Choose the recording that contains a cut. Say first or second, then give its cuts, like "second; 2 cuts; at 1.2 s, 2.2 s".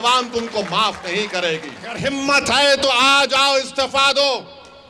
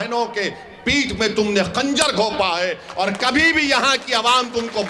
first; 1 cut; at 2.0 s